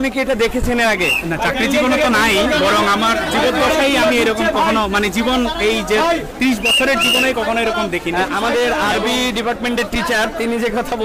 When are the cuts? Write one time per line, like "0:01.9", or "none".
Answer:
none